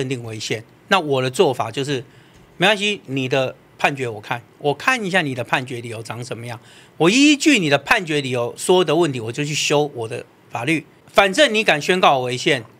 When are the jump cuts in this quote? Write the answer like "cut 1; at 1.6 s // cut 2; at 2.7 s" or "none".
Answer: cut 1; at 11.0 s